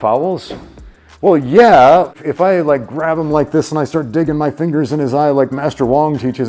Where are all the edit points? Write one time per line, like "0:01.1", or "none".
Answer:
0:02.1